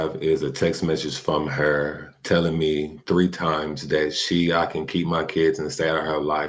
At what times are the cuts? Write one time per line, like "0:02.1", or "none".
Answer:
none